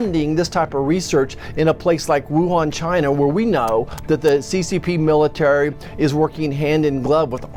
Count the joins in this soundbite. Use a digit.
0